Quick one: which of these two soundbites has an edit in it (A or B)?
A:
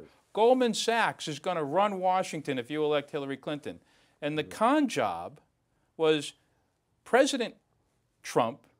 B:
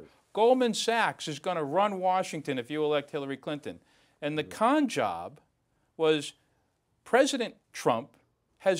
B